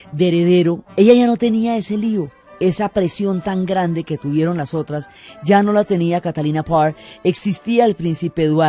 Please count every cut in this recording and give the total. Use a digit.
0